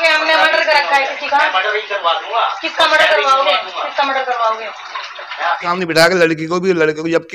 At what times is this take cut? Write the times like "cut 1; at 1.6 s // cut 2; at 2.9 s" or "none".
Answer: cut 1; at 5.7 s